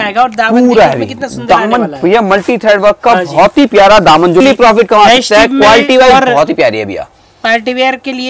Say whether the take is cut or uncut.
cut